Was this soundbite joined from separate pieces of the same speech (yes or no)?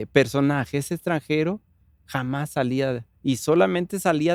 no